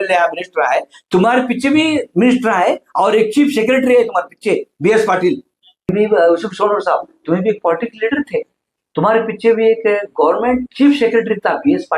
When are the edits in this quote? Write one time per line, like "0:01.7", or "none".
0:05.9